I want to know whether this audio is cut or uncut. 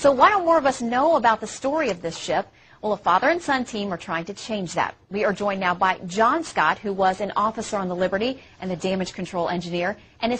cut